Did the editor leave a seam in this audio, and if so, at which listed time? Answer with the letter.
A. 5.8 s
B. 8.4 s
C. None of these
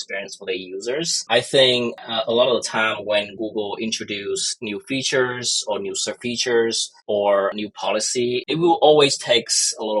B